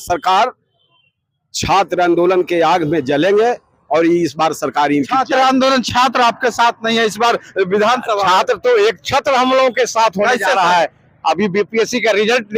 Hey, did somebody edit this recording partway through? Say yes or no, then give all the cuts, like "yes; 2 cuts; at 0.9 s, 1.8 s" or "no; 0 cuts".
no; 0 cuts